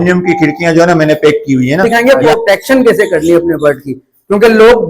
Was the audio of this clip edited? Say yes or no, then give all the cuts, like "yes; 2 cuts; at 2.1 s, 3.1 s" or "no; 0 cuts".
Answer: yes; 1 cut; at 1.8 s